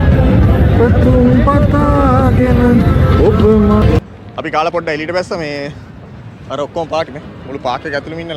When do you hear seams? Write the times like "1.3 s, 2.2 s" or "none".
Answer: 4.0 s

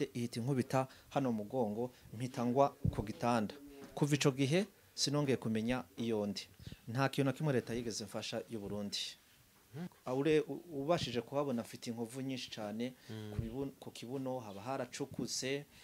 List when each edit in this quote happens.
6.5 s, 9.9 s

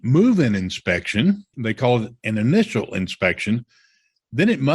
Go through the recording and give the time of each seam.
1.5 s

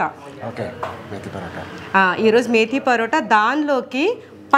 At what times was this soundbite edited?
none

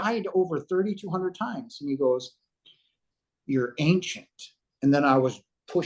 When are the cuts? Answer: none

